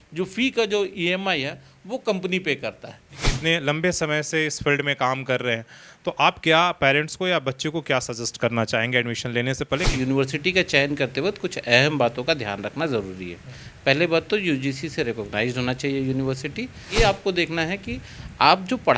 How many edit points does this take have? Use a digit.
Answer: 3